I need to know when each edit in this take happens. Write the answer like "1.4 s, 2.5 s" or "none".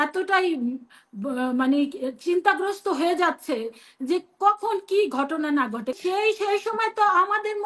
6.0 s

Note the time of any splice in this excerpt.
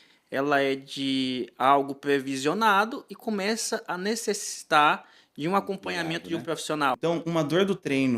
7.0 s

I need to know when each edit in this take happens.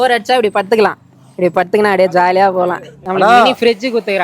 2.9 s

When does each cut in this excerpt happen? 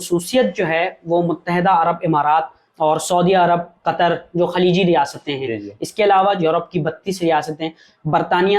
2.6 s, 6.4 s

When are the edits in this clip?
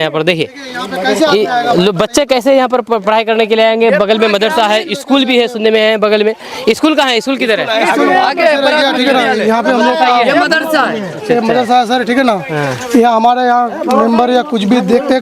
none

